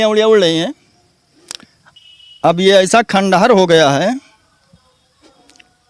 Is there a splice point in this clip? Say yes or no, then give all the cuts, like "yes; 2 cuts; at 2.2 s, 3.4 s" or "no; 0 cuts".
yes; 1 cut; at 2.1 s